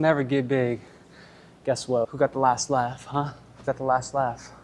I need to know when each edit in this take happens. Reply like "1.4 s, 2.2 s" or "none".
2.1 s, 3.7 s